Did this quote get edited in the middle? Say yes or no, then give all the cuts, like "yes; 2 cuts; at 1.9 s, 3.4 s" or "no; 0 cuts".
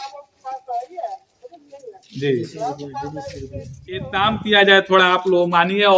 yes; 1 cut; at 4.1 s